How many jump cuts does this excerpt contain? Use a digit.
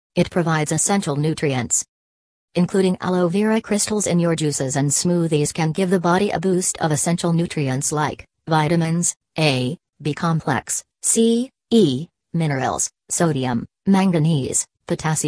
1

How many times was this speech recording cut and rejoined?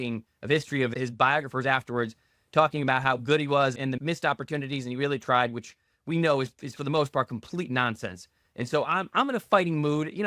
2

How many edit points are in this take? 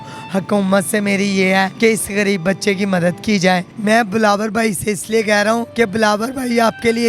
3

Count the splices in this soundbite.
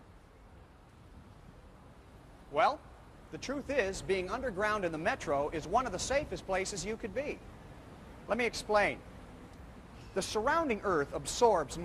0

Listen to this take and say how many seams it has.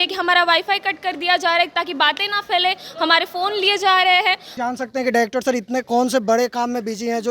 1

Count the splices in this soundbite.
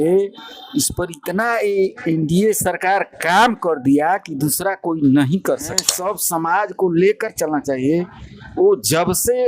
1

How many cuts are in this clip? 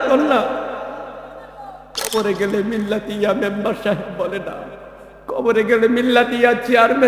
1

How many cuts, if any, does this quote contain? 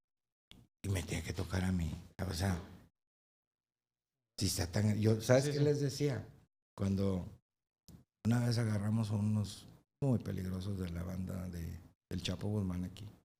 0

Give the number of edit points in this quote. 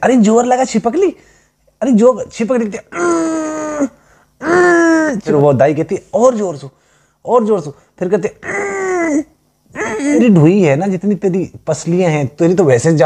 2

